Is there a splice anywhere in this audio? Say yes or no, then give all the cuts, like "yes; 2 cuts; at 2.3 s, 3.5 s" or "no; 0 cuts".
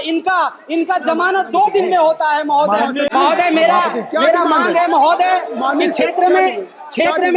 yes; 1 cut; at 3.1 s